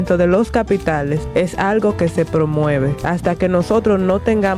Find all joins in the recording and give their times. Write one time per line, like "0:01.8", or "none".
0:01.2
0:03.0

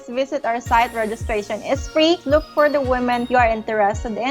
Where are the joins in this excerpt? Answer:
0:02.2
0:03.2

